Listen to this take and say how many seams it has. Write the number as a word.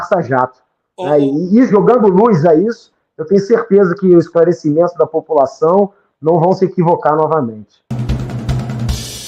one